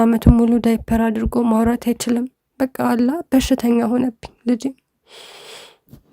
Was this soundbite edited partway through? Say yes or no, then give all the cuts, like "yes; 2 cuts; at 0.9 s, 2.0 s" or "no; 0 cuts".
no; 0 cuts